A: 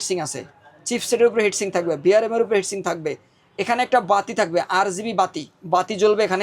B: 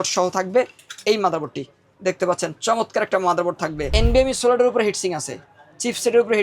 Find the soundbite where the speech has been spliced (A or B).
B